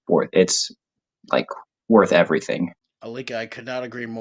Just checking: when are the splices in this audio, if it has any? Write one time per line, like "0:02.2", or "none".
0:02.9